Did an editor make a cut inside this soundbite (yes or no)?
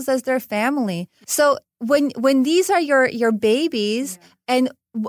yes